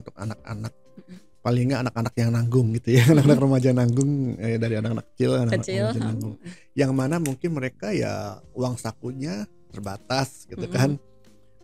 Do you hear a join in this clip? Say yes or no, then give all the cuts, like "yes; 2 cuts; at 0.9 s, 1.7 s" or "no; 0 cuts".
no; 0 cuts